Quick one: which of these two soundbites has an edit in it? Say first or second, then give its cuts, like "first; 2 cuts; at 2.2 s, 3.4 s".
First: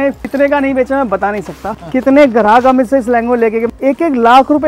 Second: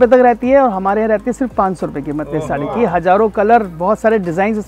first; 1 cut; at 3.7 s